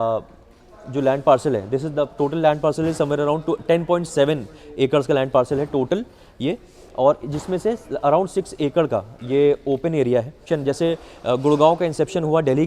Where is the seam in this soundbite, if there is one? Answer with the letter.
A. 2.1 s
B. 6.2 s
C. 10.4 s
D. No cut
C